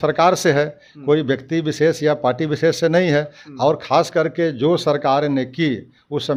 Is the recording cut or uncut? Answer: uncut